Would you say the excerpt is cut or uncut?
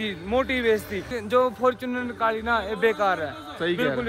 cut